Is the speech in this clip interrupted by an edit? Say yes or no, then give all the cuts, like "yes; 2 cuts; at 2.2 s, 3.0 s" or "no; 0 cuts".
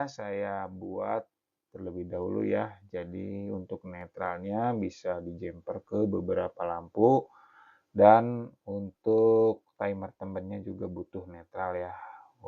yes; 1 cut; at 7.9 s